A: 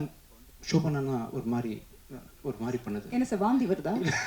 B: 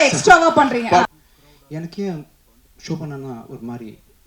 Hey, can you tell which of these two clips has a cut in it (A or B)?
B